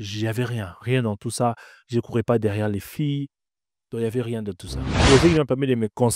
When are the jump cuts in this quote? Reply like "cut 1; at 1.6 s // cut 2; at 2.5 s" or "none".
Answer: cut 1; at 4.8 s